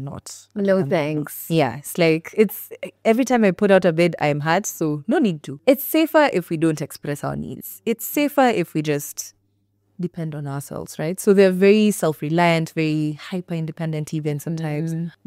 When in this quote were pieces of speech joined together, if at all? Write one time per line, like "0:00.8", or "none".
none